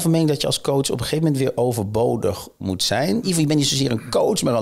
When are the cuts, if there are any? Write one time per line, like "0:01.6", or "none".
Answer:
0:03.2